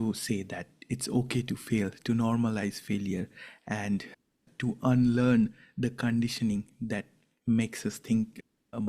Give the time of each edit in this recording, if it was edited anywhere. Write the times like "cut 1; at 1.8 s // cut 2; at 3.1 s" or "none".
none